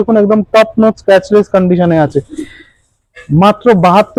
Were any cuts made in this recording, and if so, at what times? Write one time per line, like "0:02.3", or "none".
none